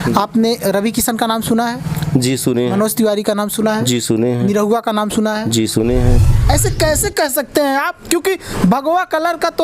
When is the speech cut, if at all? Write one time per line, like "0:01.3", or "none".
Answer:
0:06.5